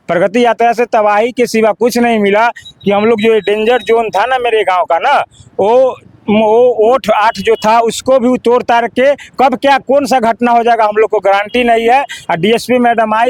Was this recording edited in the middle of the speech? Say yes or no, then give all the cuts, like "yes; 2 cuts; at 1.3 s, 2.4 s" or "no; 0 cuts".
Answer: no; 0 cuts